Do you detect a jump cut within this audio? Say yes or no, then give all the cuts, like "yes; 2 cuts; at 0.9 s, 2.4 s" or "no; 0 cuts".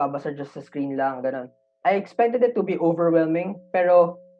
yes; 1 cut; at 1.7 s